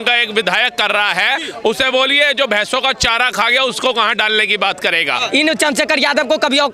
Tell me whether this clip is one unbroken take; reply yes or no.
no